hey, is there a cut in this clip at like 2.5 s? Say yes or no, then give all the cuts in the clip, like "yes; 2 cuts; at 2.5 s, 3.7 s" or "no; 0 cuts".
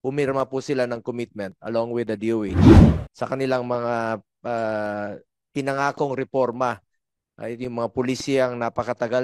yes; 2 cuts; at 2.5 s, 2.9 s